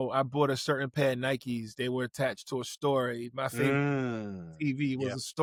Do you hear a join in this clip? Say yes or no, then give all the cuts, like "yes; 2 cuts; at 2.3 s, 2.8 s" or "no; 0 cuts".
no; 0 cuts